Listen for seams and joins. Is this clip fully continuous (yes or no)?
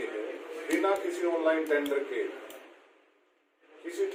yes